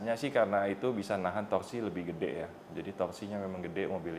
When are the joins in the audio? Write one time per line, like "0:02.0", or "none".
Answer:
none